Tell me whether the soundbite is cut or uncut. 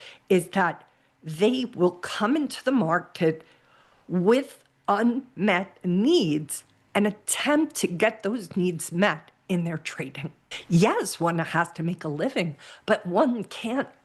cut